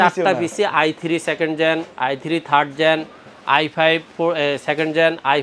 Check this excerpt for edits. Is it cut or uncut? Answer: uncut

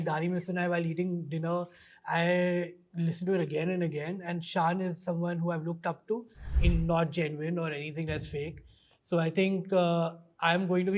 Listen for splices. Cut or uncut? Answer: cut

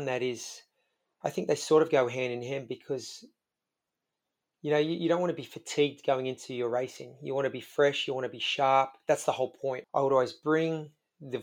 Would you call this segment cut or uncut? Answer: cut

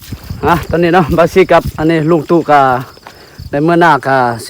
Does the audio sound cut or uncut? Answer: uncut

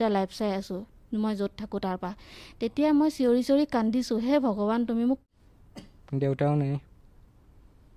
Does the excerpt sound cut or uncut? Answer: cut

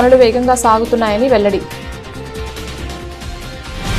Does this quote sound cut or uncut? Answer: uncut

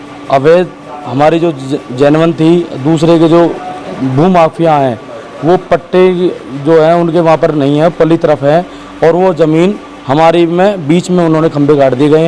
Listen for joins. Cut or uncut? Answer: uncut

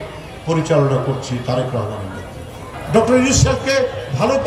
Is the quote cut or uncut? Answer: cut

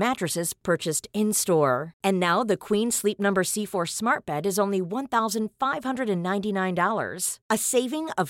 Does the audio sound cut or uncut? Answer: uncut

